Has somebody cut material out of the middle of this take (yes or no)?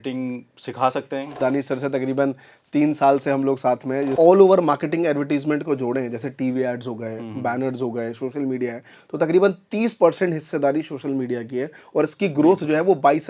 yes